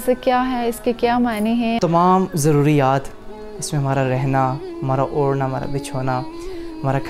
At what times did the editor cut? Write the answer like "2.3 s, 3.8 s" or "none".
1.8 s